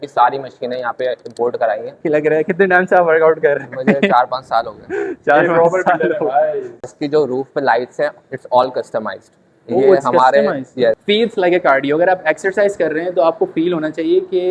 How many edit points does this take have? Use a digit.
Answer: 3